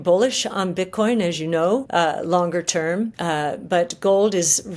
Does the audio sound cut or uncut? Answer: cut